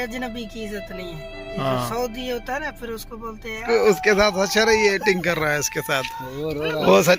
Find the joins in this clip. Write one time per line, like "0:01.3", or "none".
0:03.6